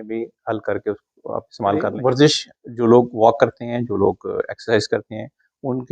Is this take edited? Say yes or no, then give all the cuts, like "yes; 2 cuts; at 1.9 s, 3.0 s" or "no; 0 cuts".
yes; 1 cut; at 1.9 s